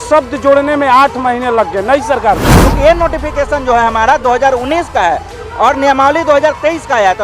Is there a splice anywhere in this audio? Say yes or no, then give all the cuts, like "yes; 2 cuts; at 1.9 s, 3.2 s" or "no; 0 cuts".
yes; 1 cut; at 2.6 s